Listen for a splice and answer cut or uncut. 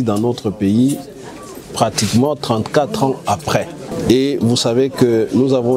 cut